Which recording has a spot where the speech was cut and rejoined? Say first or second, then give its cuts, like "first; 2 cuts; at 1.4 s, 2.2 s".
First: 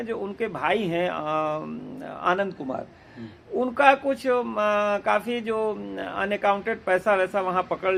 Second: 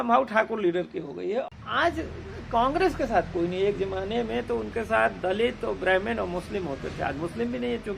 second; 1 cut; at 1.5 s